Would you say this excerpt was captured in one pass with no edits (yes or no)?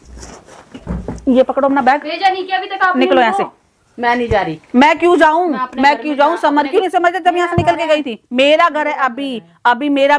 no